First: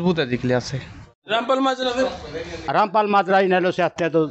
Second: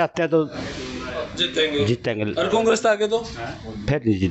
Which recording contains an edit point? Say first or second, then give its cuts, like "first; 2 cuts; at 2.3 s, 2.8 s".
first; 1 cut; at 1.3 s